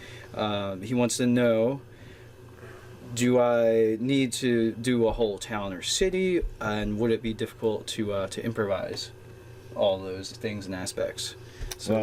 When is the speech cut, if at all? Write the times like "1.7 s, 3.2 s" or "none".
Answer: 9.9 s